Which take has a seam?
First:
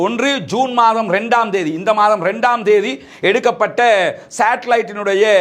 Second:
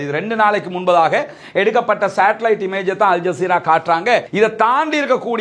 second; 1 cut; at 4.3 s

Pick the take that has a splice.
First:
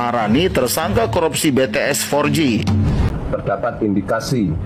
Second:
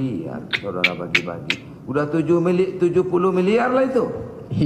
first; 1 cut; at 3.1 s

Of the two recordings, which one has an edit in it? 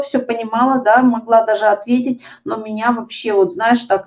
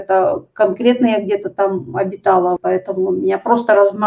second; 1 cut; at 2.6 s

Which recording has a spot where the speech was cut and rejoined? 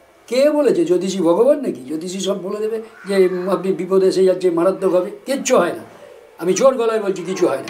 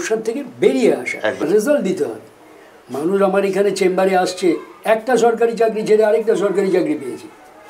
second; 1 cut; at 1.4 s

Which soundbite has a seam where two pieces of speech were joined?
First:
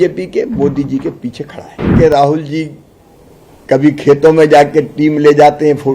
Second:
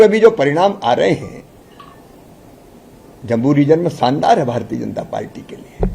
first; 1 cut; at 1.9 s

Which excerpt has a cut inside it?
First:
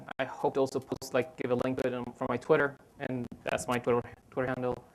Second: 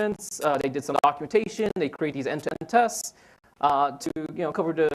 second; 1 cut; at 3.7 s

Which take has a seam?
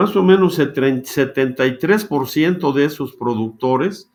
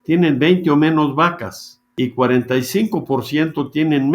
second; 1 cut; at 1.9 s

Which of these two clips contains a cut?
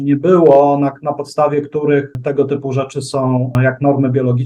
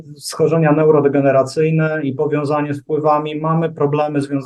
first; 2 cuts; at 2.1 s, 3.5 s

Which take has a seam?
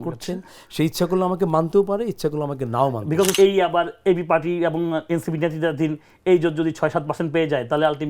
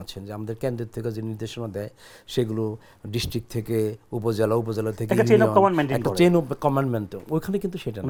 first; 1 cut; at 3.3 s

